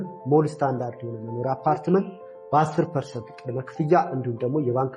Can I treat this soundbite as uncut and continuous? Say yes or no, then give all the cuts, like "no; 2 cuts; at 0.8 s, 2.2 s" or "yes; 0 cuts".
yes; 0 cuts